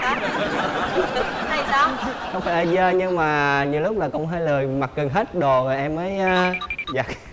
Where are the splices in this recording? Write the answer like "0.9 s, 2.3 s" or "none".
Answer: none